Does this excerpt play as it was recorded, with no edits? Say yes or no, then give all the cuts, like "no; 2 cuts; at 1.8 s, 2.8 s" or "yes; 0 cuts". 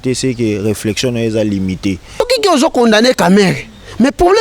no; 1 cut; at 2.2 s